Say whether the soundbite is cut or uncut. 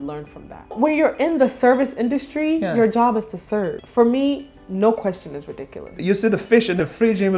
cut